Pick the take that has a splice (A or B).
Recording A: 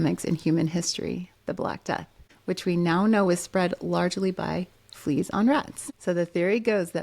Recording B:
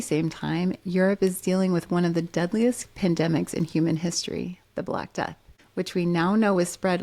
A